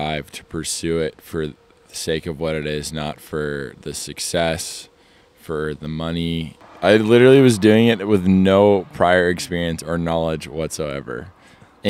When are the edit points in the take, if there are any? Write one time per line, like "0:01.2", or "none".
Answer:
0:06.6